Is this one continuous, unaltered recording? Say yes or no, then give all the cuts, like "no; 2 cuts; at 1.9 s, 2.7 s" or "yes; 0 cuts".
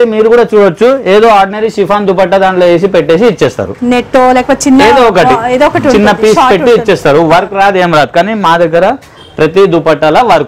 yes; 0 cuts